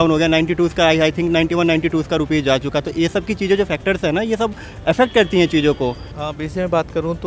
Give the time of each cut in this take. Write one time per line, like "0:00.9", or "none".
0:06.1